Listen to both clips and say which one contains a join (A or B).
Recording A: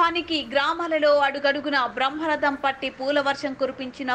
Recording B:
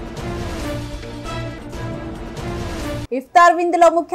B